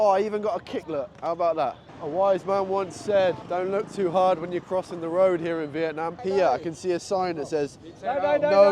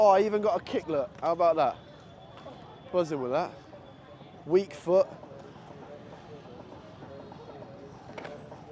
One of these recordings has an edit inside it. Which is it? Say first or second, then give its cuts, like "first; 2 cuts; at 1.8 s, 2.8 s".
first; 3 cuts; at 1.9 s, 3.4 s, 6.2 s